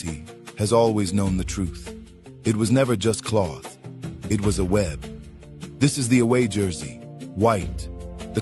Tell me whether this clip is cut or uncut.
cut